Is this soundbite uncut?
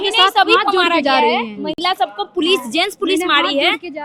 yes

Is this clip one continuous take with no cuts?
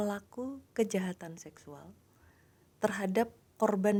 yes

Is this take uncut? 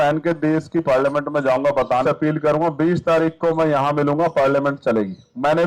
no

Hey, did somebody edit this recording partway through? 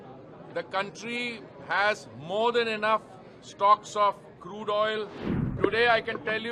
yes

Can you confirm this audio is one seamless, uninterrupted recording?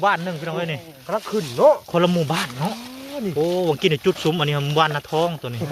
yes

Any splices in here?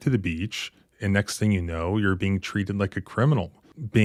no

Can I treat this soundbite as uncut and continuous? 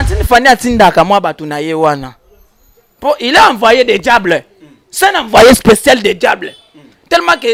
yes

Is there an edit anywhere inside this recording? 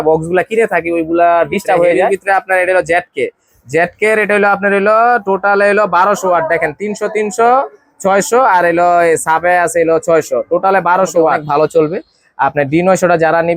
yes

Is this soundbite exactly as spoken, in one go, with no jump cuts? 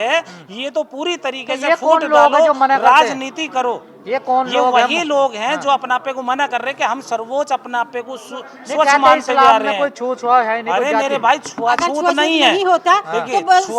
yes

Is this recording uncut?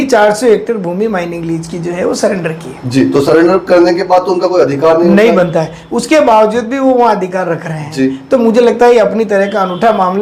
yes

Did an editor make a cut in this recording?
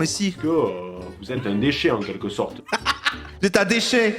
yes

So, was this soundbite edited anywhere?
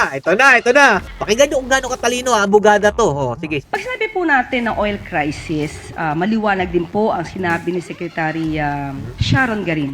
yes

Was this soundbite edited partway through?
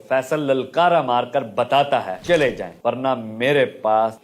yes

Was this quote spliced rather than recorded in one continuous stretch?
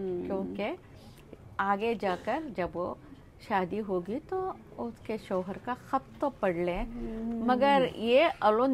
no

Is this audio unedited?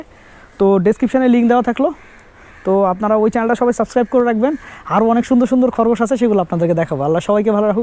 yes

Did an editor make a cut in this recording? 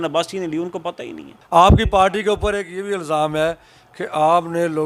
yes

